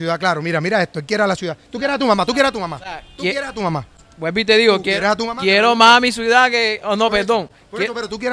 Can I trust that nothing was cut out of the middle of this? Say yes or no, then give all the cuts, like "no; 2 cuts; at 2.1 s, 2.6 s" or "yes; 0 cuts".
yes; 0 cuts